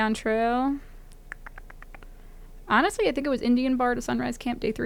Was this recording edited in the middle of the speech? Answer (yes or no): no